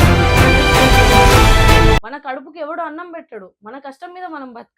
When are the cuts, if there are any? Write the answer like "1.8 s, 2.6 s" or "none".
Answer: 2.1 s

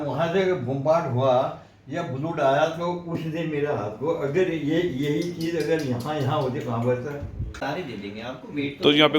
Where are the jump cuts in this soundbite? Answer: 7.6 s

